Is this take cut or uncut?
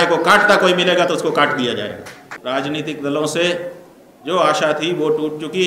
cut